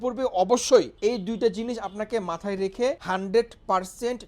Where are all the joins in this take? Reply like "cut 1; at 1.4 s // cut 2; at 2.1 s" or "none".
cut 1; at 0.9 s // cut 2; at 3.0 s